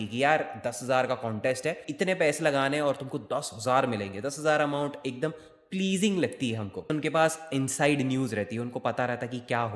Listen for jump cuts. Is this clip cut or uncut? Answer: cut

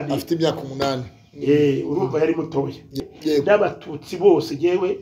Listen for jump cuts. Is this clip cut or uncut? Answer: cut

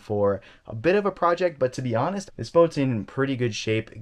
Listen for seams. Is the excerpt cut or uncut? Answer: cut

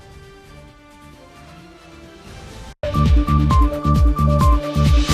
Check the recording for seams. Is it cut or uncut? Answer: cut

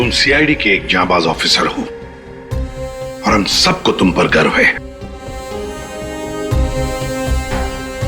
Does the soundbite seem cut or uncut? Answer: uncut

